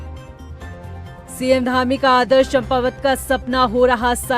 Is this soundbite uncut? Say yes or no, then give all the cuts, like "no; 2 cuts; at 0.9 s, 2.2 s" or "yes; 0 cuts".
no; 1 cut; at 1.4 s